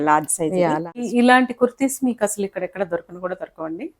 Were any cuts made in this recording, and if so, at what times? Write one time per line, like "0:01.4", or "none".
0:01.1